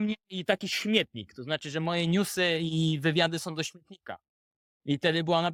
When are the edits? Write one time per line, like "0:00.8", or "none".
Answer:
none